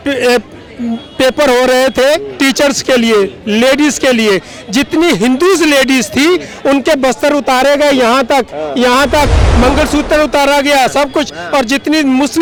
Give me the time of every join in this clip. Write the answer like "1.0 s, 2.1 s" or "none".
none

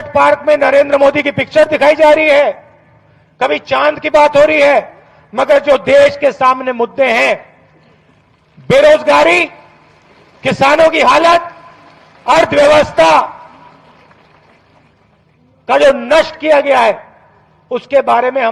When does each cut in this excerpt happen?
none

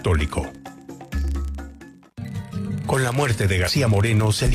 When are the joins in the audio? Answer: 1.1 s

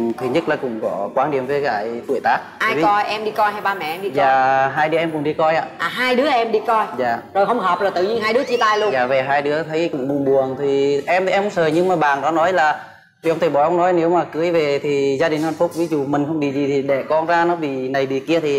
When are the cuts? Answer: 2.5 s

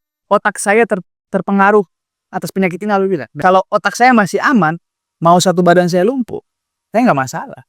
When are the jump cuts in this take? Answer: 3.3 s

